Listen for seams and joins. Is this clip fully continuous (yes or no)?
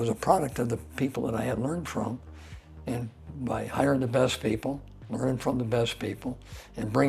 yes